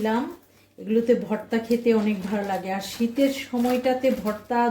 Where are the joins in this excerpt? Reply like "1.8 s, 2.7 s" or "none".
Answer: none